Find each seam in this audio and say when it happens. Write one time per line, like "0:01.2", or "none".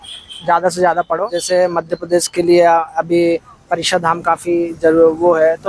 0:01.3